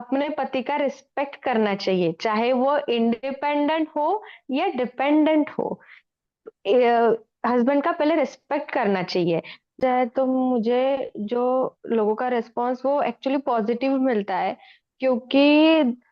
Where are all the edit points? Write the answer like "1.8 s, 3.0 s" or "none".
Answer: 9.8 s

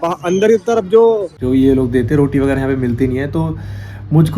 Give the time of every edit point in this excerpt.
1.3 s

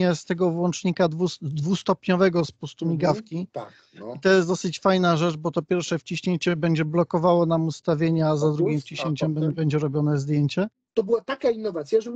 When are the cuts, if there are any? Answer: 10.8 s

